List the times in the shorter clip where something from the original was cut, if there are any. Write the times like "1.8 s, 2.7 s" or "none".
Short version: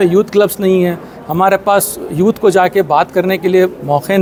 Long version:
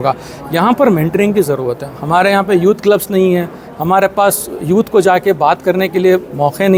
none